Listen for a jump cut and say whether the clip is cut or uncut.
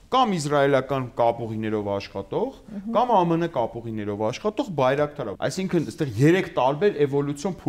cut